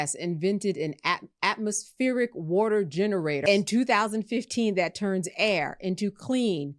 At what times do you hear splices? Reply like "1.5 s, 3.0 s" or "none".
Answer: 3.4 s